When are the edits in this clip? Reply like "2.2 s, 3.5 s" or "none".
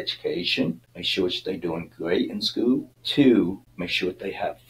0.9 s, 3.0 s, 3.7 s